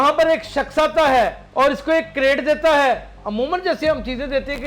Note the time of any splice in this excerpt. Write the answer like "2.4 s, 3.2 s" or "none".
1.4 s